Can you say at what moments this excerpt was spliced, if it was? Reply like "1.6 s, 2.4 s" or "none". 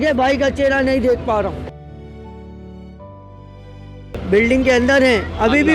4.1 s